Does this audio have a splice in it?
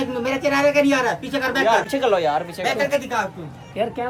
no; 0 cuts

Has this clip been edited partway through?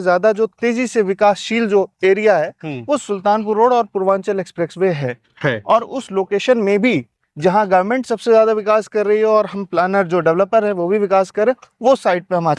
no; 0 cuts

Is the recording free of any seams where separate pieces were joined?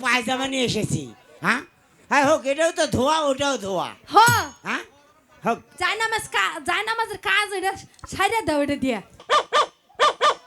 no; 1 cut; at 9.2 s

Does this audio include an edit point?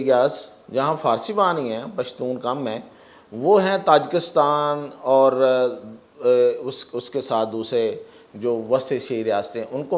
no; 0 cuts

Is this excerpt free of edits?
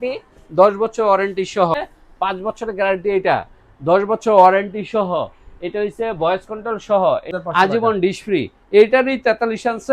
no; 2 cuts; at 1.7 s, 7.4 s

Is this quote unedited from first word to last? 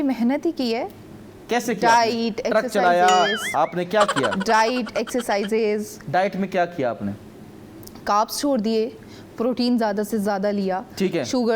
yes; 0 cuts

